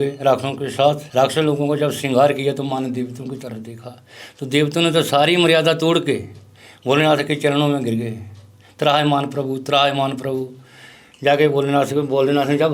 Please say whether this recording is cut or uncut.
cut